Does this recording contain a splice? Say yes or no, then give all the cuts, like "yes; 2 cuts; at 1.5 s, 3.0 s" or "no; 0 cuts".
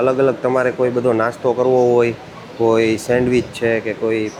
no; 0 cuts